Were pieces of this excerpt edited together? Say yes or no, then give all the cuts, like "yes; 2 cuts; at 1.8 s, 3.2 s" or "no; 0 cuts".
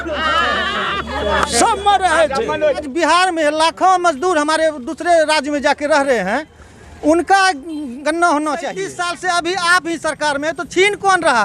yes; 2 cuts; at 2.9 s, 9.0 s